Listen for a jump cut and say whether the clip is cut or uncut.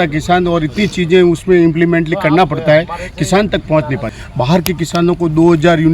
cut